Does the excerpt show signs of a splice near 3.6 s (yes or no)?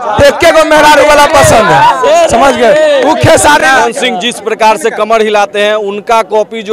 yes